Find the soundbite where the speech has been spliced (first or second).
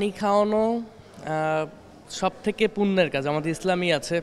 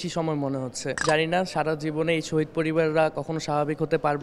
second